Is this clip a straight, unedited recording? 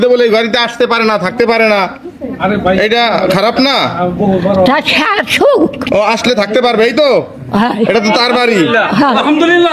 yes; 0 cuts

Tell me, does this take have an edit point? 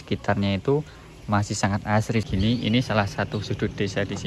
yes; 1 cut; at 2.2 s

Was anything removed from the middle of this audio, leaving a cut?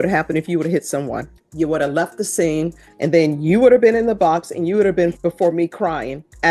yes; 3 cuts; at 1.4 s, 2.8 s, 5.2 s

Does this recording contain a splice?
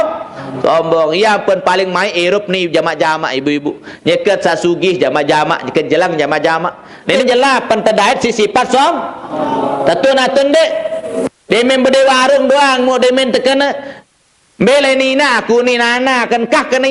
yes; 1 cut; at 7.1 s

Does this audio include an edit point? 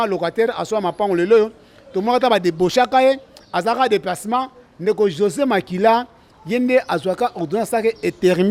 no; 0 cuts

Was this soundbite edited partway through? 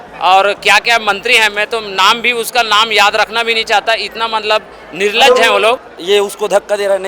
yes; 1 cut; at 5.9 s

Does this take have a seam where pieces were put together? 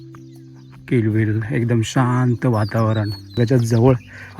yes; 1 cut; at 3.4 s

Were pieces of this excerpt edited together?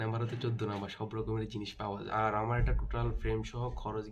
yes; 1 cut; at 2.0 s

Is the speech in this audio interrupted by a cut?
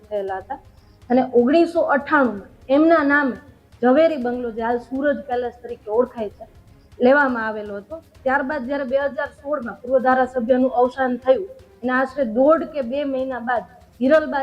no; 0 cuts

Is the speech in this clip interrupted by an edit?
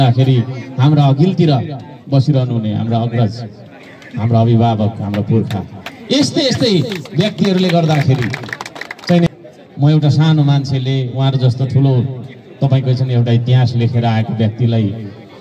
yes; 1 cut; at 9.3 s

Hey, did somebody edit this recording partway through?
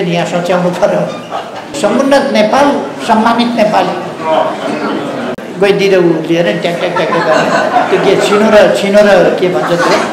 yes; 2 cuts; at 1.7 s, 5.3 s

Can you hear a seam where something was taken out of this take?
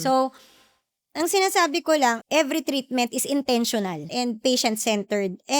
yes; 2 cuts; at 2.2 s, 4.1 s

